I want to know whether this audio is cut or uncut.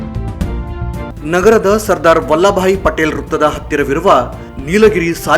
cut